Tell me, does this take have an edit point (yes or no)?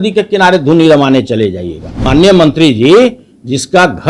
yes